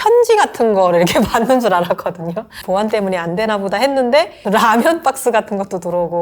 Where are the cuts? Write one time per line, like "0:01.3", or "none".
0:02.6
0:04.4